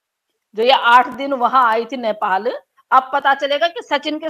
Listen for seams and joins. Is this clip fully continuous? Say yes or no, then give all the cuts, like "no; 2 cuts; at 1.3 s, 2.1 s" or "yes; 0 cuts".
yes; 0 cuts